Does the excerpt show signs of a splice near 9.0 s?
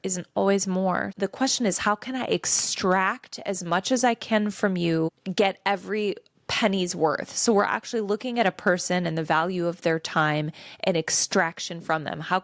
no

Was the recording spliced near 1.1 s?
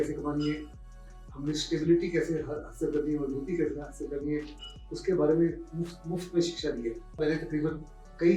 no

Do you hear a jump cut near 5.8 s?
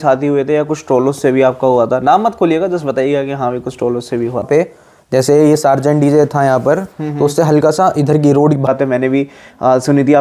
no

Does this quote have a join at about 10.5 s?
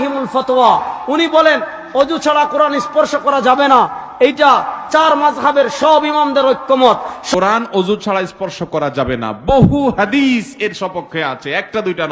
no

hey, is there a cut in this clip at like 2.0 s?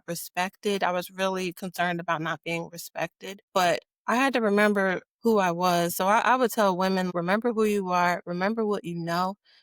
no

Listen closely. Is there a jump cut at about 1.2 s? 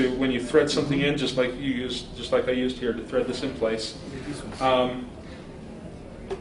no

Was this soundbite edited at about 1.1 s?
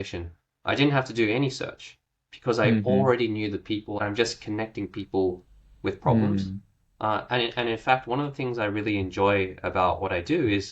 no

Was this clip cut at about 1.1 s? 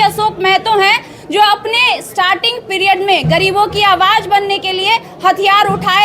no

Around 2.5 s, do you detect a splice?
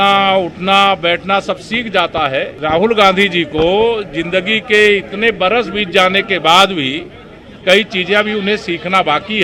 yes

